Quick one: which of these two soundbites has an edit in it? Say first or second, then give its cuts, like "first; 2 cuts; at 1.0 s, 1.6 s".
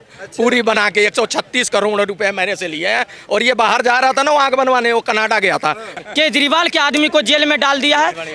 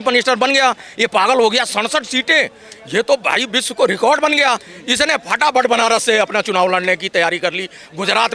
first; 1 cut; at 6.0 s